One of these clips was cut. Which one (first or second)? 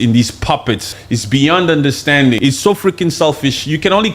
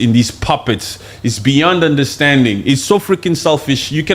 first